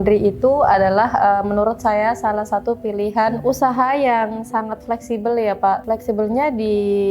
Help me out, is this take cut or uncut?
cut